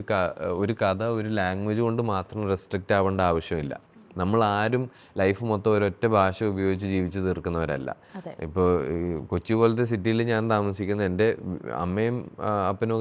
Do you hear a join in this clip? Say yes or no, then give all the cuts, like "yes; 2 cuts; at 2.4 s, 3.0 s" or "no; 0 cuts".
no; 0 cuts